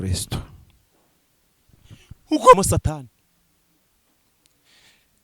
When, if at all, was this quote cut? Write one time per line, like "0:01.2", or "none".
0:02.6